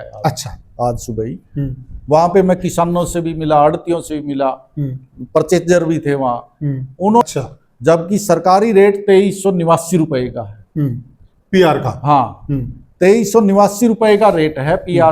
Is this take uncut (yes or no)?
no